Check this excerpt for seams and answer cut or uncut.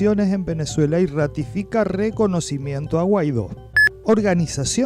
cut